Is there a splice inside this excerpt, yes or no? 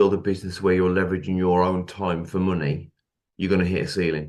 no